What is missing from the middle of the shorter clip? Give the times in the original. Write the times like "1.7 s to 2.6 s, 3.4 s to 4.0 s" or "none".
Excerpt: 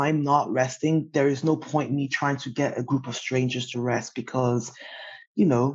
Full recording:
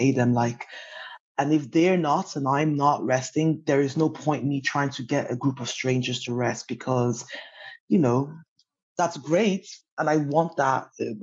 none